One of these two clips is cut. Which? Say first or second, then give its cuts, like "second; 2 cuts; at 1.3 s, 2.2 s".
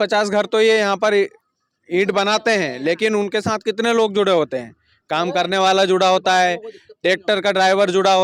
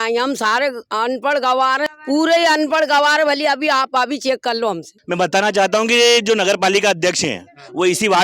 second; 2 cuts; at 1.9 s, 4.9 s